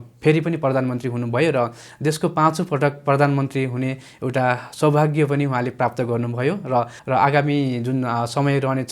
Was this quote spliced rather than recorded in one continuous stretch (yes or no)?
yes